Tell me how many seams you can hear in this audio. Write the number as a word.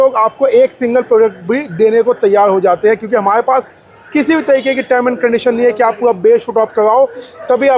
zero